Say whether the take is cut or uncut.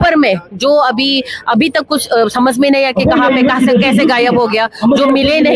uncut